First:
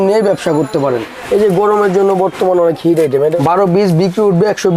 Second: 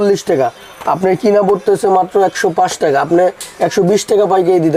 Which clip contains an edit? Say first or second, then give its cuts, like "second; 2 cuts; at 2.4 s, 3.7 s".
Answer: first; 2 cuts; at 1.2 s, 3.4 s